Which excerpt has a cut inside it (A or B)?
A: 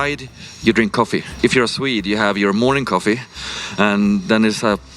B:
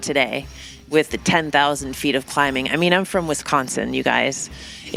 A